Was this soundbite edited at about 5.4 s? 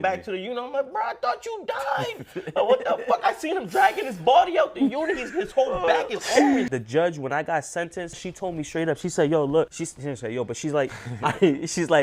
no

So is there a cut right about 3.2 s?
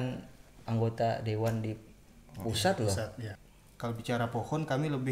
yes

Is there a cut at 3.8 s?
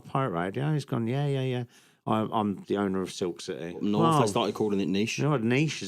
yes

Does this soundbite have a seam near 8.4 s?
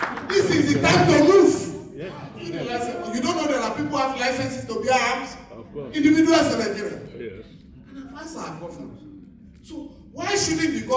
no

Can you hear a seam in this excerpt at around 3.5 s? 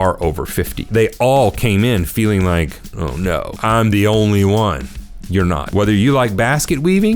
yes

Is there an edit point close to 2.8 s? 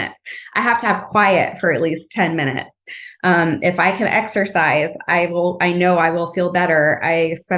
no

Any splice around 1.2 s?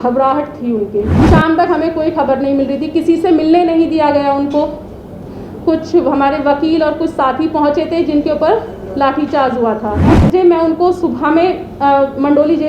yes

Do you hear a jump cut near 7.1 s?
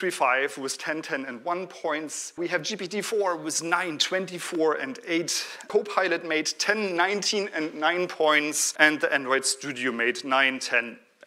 no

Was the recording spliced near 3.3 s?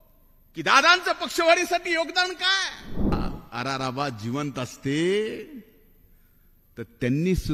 yes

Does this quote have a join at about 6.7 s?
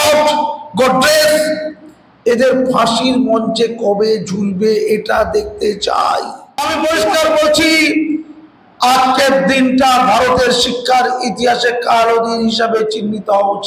yes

